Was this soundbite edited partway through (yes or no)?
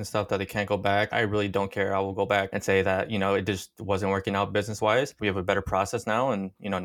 no